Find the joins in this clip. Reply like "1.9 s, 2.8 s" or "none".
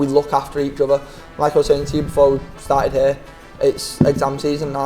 none